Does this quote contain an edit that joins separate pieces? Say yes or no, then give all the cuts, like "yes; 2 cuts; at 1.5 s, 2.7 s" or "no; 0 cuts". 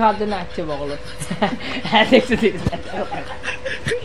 no; 0 cuts